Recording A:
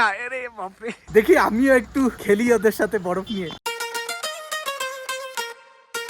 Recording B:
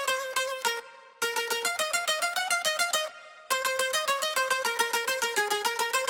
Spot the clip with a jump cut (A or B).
A